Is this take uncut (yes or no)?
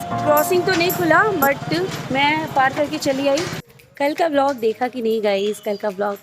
no